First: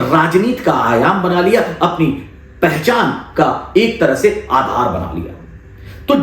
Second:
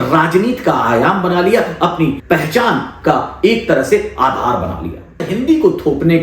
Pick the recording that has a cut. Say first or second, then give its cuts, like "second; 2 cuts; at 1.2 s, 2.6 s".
second; 2 cuts; at 2.2 s, 5.3 s